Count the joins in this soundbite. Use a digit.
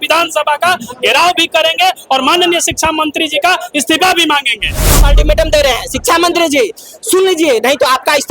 1